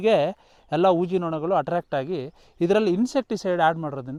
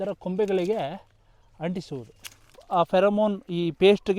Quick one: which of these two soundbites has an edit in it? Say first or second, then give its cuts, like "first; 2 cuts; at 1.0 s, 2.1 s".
second; 1 cut; at 2.6 s